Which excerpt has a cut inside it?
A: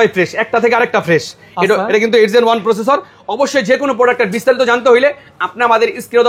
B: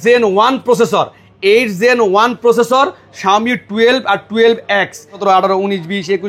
B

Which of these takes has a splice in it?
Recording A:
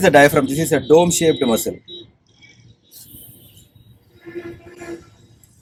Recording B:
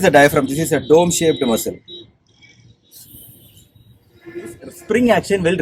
B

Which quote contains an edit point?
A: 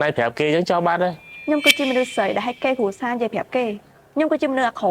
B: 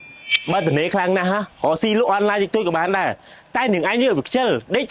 A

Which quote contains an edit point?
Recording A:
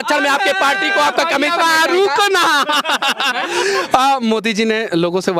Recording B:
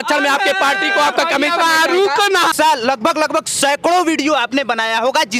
B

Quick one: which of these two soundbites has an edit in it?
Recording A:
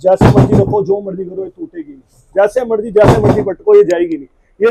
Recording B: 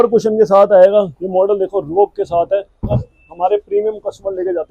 B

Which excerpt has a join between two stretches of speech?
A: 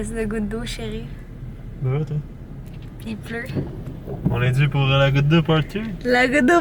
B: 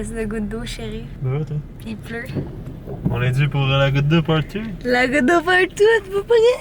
B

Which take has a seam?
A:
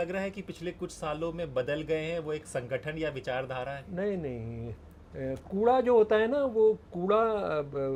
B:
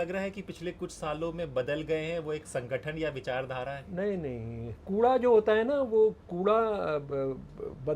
B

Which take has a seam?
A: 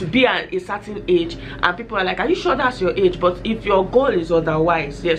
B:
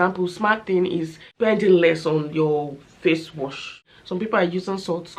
B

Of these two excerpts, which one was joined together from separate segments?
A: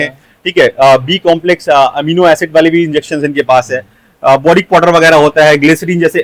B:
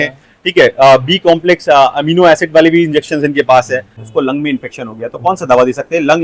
B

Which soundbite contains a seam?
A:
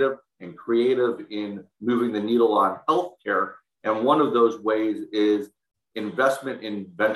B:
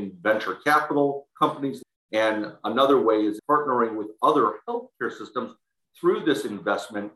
B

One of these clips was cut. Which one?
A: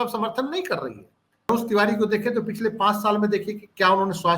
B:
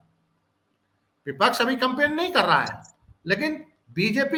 A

